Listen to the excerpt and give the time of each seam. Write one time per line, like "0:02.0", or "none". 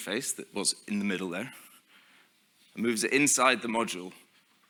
none